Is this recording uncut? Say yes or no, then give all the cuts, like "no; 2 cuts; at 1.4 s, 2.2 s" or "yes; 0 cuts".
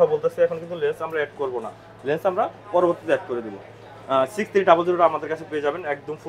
yes; 0 cuts